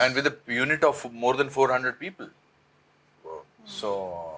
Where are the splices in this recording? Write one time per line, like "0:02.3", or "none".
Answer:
none